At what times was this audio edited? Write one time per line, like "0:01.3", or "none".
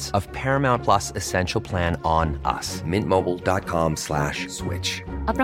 none